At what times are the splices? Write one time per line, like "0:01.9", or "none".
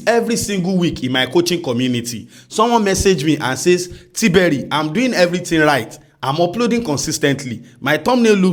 none